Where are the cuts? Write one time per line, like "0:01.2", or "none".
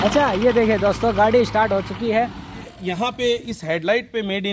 0:02.7